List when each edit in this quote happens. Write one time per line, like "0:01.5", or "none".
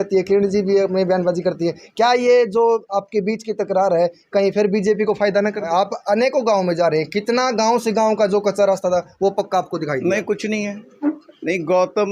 0:05.7
0:10.8